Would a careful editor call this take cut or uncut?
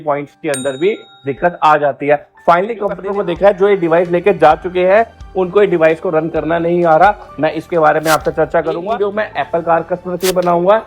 cut